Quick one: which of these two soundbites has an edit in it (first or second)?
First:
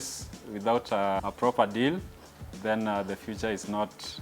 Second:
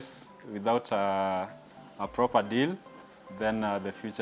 first